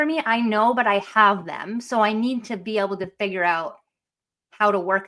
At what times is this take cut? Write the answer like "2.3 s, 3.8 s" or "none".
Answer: none